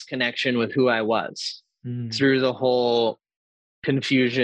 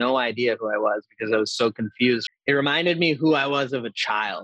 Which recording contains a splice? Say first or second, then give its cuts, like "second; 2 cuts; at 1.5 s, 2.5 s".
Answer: second; 1 cut; at 2.3 s